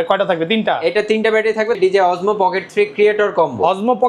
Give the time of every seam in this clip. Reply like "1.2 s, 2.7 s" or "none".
1.8 s